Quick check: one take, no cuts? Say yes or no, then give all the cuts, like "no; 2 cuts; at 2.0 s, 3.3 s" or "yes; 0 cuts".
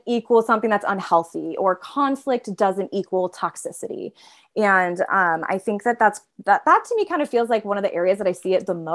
yes; 0 cuts